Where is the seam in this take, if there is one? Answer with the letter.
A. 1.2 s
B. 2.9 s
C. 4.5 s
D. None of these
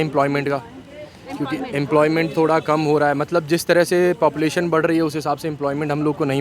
D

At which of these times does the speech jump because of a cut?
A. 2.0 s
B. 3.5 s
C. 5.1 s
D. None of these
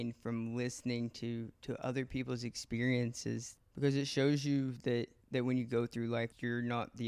B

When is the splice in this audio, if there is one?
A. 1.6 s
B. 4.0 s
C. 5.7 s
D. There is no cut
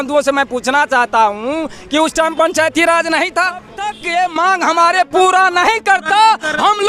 B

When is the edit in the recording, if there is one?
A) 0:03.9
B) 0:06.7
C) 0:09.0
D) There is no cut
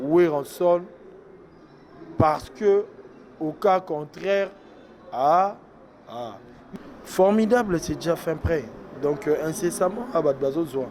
B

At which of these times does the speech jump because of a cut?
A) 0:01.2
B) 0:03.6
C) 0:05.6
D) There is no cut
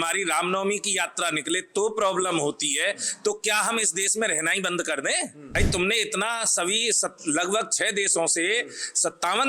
C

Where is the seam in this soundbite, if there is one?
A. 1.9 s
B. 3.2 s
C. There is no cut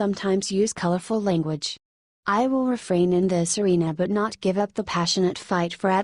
A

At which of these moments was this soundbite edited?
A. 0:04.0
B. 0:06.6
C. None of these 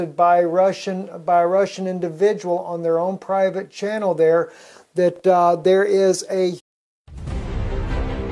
C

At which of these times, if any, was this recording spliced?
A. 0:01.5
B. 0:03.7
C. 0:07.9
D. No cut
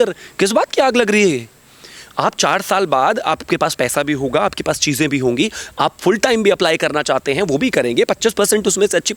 D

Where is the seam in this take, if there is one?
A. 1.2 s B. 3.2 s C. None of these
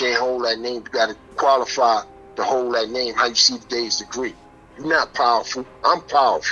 A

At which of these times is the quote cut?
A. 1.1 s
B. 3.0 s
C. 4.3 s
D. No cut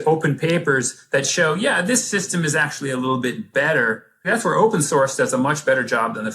C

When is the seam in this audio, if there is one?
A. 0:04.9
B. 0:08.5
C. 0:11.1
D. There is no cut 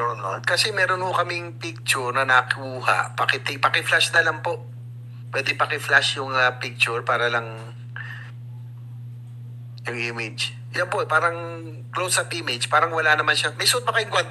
D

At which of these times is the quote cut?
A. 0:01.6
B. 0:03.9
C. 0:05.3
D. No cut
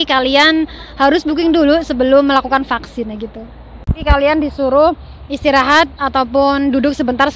B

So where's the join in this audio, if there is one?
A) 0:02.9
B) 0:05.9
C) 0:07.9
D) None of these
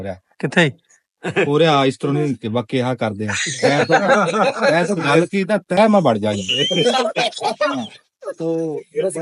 D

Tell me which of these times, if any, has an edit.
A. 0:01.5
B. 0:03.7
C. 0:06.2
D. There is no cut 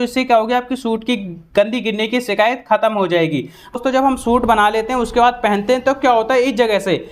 B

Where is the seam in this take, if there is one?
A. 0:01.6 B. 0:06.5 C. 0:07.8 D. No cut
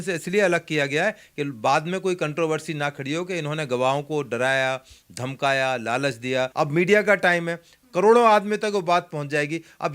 B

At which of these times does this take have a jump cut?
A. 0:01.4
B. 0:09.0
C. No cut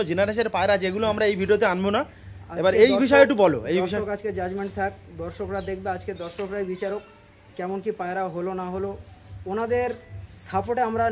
C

